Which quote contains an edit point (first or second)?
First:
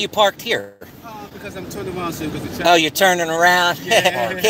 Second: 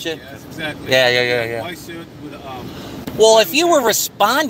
second